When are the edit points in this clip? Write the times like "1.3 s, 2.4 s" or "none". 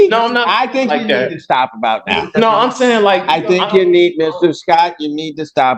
none